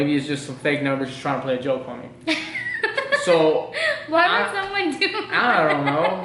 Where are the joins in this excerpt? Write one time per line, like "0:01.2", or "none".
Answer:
none